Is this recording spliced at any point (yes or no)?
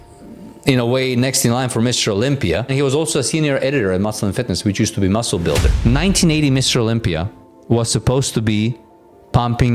yes